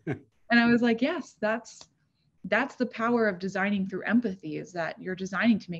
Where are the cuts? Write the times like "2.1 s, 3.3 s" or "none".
none